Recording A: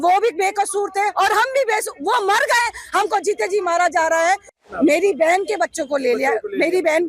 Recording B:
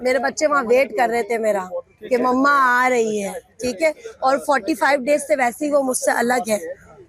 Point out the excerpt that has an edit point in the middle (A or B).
A